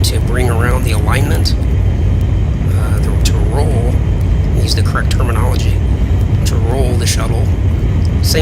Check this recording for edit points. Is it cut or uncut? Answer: uncut